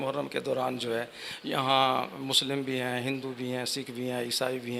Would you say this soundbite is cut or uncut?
uncut